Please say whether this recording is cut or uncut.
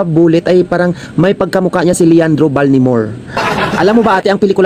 cut